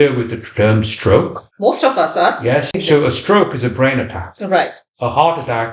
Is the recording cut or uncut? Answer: cut